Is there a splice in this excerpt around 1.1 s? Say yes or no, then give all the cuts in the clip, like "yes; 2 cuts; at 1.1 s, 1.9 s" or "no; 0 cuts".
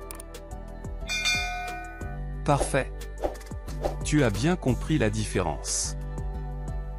yes; 1 cut; at 1.1 s